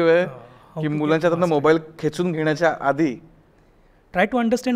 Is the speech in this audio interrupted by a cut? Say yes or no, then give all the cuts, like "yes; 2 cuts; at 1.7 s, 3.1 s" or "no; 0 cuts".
no; 0 cuts